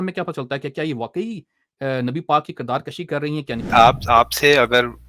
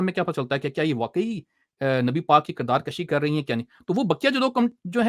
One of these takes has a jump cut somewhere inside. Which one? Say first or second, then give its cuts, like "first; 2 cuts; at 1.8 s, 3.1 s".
first; 1 cut; at 3.7 s